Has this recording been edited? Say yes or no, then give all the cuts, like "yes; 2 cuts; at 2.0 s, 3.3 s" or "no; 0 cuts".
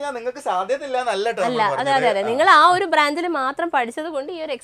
no; 0 cuts